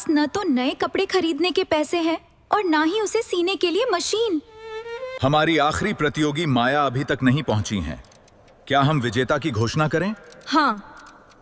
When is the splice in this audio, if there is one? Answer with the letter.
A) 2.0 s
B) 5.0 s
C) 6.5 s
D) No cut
B